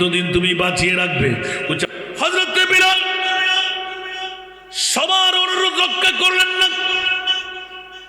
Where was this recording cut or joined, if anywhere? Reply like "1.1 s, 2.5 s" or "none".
1.9 s